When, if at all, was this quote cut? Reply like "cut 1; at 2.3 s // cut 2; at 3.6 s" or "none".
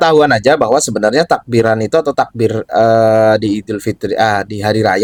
none

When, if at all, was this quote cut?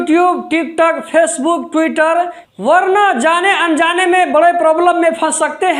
cut 1; at 2.5 s

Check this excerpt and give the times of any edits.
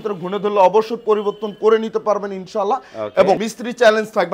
cut 1; at 3.4 s

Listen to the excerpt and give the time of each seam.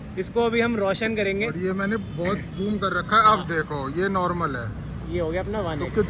none

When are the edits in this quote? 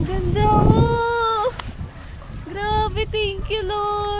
none

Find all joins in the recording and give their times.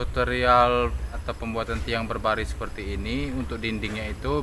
cut 1; at 1.2 s

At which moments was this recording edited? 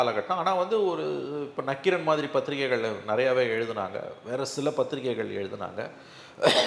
none

